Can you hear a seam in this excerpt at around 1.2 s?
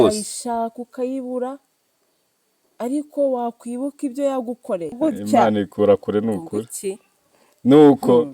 no; 1 cut; at 5.0 s

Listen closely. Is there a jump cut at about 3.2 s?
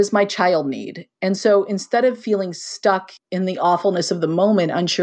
yes; 1 cut; at 3.2 s

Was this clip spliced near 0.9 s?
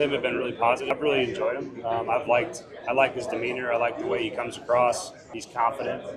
yes; 2 cuts; at 0.9 s, 5.2 s

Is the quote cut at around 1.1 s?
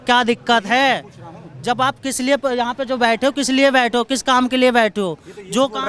no; 0 cuts

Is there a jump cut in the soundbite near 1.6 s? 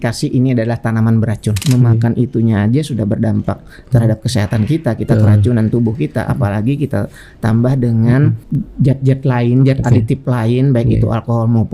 yes; 2 cuts; at 1.6 s, 8.4 s

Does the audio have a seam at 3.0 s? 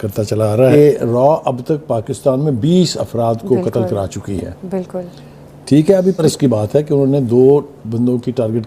no; 2 cuts; at 0.7 s, 6.2 s

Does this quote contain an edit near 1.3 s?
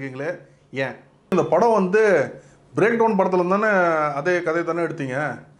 yes; 1 cut; at 1.3 s

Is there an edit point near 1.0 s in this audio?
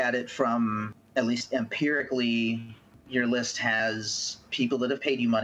yes; 1 cut; at 1.0 s

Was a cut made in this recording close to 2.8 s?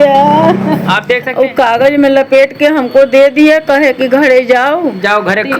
no; 1 cut; at 1.3 s

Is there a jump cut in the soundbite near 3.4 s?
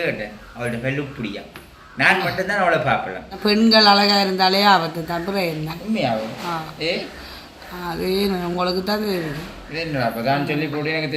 yes; 1 cut; at 3.4 s

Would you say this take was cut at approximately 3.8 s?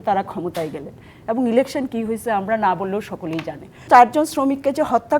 yes; 1 cut; at 3.8 s

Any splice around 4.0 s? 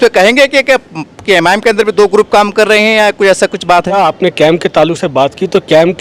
yes; 1 cut; at 4.0 s

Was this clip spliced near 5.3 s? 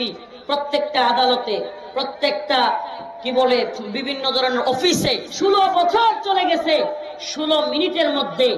yes; 1 cut; at 5.3 s

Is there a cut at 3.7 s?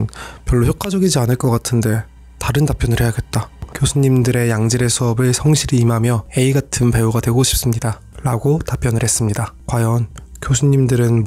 yes; 1 cut; at 3.7 s

